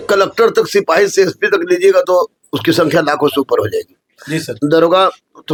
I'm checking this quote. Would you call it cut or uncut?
uncut